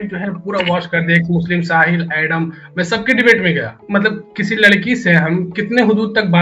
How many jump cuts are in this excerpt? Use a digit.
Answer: 1